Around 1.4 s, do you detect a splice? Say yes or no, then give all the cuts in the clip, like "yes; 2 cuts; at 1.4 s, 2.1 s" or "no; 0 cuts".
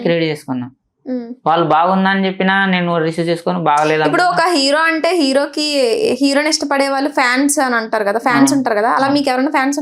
no; 0 cuts